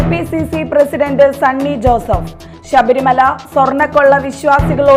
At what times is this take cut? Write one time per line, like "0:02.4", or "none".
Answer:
none